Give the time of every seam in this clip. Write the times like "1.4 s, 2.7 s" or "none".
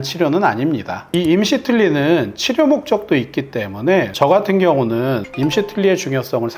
1.0 s, 4.1 s, 5.2 s